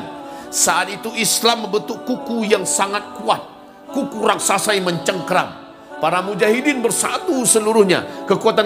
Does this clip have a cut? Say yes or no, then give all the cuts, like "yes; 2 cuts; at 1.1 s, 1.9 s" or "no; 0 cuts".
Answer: no; 0 cuts